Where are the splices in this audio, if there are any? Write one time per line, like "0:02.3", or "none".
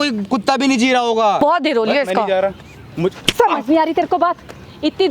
0:01.4